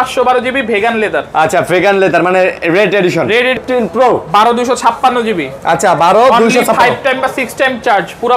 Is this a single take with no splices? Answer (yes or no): no